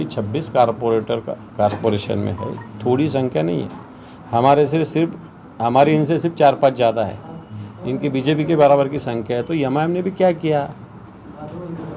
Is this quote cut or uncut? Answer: uncut